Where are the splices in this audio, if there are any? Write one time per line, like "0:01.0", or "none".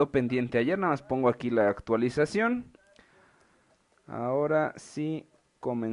0:02.9